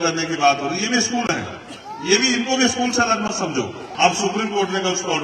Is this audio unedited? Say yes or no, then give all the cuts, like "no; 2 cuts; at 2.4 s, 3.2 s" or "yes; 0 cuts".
no; 1 cut; at 3.8 s